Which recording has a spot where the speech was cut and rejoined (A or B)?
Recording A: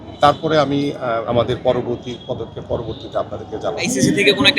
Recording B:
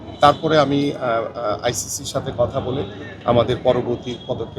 A